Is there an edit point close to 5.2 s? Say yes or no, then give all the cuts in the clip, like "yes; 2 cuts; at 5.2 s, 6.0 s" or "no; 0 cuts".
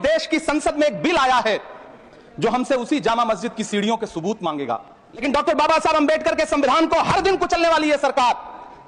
yes; 1 cut; at 5.2 s